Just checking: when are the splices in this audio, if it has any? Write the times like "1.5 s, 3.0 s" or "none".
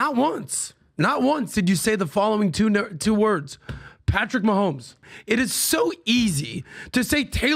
5.1 s